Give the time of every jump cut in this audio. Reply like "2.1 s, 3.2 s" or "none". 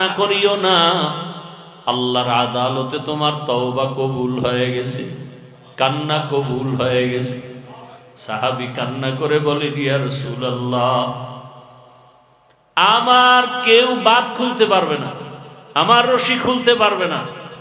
none